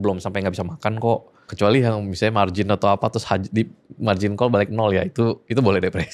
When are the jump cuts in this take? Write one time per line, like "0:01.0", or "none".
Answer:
0:01.5